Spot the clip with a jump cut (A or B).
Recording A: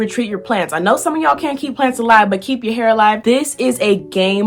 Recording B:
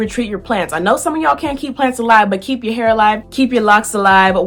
A